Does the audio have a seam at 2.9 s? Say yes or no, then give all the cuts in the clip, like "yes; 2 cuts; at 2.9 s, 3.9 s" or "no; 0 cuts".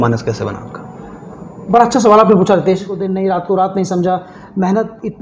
yes; 1 cut; at 2.9 s